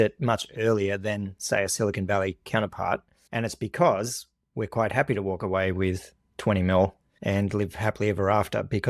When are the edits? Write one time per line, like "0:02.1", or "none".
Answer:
0:03.2